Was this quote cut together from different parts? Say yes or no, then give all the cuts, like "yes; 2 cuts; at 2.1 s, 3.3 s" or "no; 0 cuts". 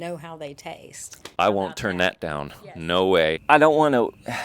yes; 1 cut; at 3.4 s